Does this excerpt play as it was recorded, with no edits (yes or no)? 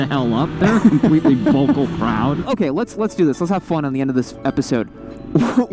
no